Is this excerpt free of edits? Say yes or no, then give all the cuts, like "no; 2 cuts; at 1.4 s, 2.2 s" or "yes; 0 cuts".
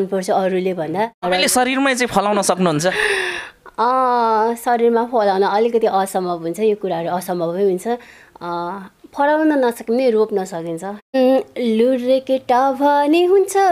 no; 2 cuts; at 1.2 s, 11.1 s